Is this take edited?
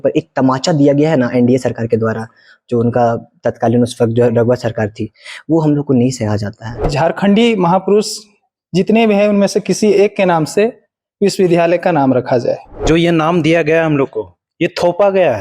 yes; 2 cuts; at 6.9 s, 12.9 s

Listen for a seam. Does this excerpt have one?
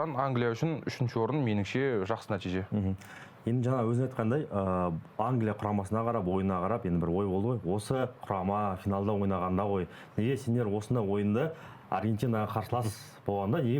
no; 0 cuts

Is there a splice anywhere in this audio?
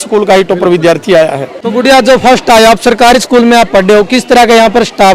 yes; 1 cut; at 1.5 s

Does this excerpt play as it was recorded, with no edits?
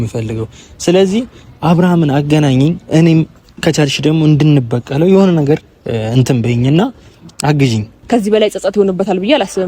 no; 1 cut; at 7.9 s

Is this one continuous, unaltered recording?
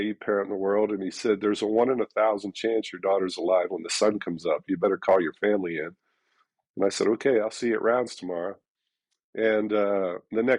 yes; 0 cuts

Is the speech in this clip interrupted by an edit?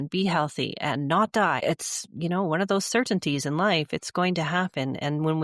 yes; 1 cut; at 1.6 s

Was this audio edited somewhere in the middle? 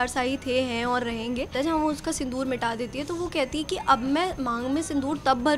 yes; 1 cut; at 1.5 s

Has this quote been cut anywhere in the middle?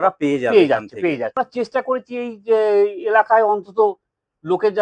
yes; 1 cut; at 1.3 s

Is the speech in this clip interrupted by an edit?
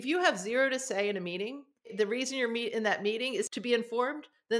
yes; 2 cuts; at 1.9 s, 3.6 s

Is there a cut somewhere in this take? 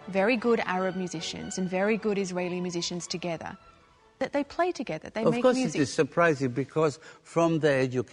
no; 0 cuts

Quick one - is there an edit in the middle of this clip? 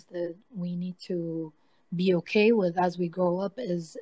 no; 0 cuts

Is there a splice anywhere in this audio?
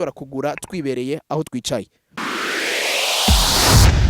yes; 1 cut; at 2.0 s

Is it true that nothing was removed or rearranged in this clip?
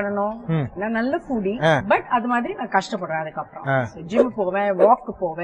no; 2 cuts; at 0.8 s, 1.8 s

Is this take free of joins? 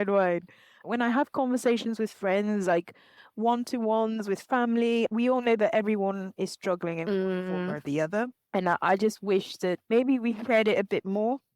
no; 1 cut; at 8.4 s

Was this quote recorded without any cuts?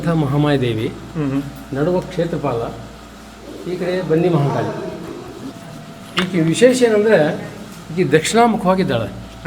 no; 1 cut; at 5.5 s

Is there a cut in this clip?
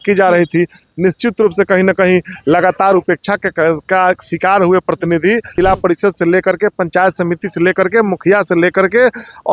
yes; 1 cut; at 5.5 s

